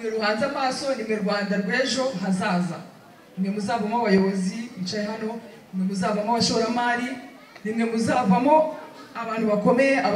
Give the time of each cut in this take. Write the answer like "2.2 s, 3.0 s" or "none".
none